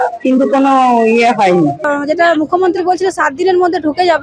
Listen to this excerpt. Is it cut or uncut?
cut